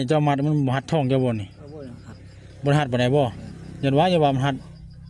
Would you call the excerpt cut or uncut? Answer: uncut